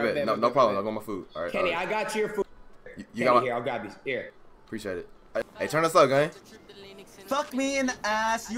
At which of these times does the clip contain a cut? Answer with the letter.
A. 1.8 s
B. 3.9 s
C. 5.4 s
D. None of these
C